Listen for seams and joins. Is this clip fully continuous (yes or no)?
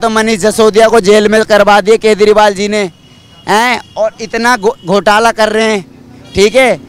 yes